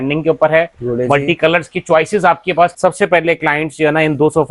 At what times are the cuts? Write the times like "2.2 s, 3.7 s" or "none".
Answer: 2.7 s